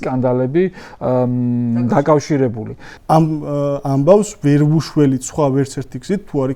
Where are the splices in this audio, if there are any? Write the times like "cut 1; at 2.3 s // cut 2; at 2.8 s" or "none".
cut 1; at 2.9 s